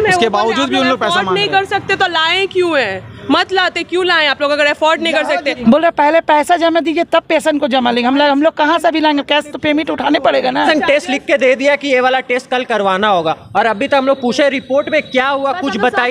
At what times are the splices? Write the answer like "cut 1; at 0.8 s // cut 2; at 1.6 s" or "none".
cut 1; at 5.4 s // cut 2; at 10.7 s